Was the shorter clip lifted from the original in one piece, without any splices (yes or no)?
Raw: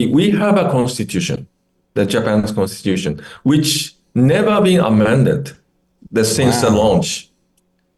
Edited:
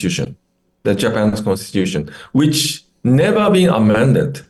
yes